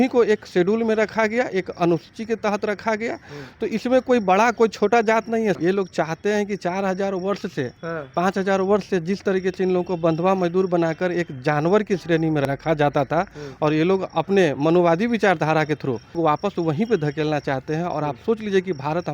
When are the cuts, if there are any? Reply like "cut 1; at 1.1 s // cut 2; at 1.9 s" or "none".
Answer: cut 1; at 5.6 s // cut 2; at 12.4 s // cut 3; at 16.2 s

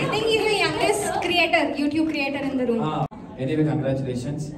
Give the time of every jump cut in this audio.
cut 1; at 3.2 s

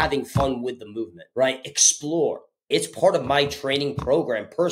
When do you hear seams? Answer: cut 1; at 1.2 s // cut 2; at 2.7 s

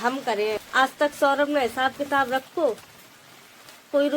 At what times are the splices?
none

